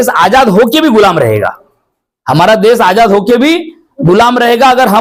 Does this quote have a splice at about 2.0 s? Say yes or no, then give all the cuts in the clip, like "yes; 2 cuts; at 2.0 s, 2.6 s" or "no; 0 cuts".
no; 0 cuts